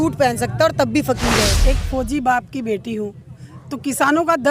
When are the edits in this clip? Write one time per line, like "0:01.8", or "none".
0:01.6